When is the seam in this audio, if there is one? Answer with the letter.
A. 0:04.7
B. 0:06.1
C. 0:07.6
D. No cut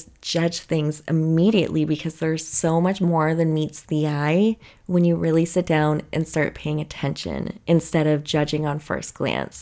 D